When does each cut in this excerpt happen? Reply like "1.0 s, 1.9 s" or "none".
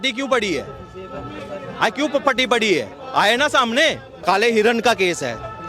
4.1 s